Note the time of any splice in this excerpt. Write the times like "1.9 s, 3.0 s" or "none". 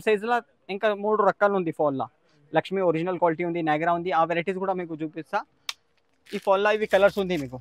none